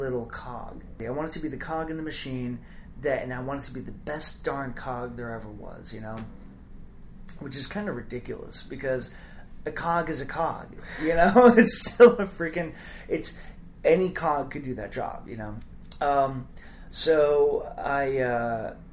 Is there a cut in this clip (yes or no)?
yes